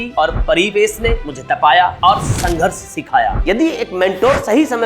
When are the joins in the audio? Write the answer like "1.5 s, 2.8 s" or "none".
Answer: 3.4 s